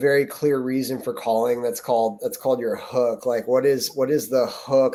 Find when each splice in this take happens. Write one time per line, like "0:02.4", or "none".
none